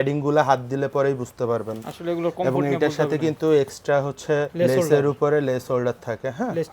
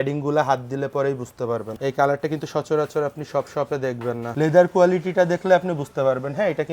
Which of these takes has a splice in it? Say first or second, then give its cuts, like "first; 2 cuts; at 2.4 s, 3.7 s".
second; 2 cuts; at 1.8 s, 4.3 s